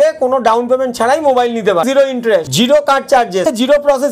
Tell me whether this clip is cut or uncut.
cut